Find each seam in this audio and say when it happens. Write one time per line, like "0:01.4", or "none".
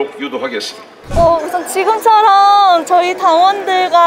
0:01.0